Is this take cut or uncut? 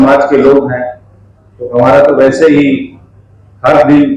uncut